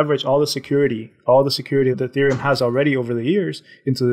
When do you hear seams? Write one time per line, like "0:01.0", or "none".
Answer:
none